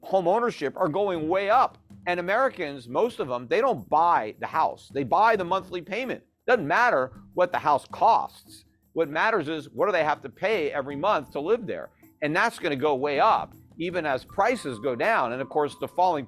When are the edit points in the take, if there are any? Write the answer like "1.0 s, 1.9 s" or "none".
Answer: 1.9 s